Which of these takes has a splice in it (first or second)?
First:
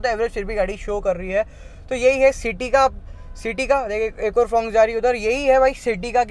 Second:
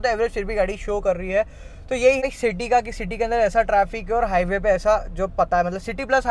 second